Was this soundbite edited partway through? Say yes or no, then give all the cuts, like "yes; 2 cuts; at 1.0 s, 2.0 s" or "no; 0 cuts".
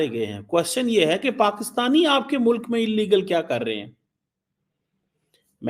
no; 0 cuts